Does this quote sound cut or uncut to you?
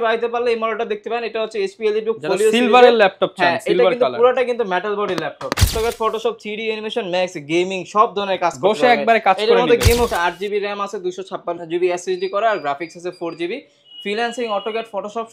cut